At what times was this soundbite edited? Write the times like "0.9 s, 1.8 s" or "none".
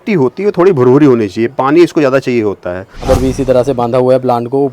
3.0 s